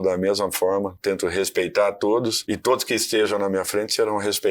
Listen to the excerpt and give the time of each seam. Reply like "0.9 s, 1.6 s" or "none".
0.9 s, 2.4 s